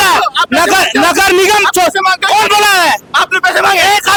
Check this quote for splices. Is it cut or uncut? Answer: uncut